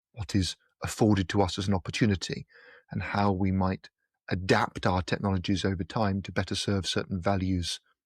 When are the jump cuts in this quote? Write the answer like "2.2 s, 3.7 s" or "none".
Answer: none